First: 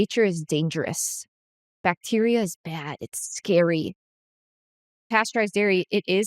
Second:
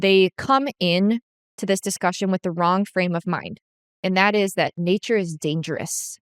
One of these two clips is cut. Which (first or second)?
first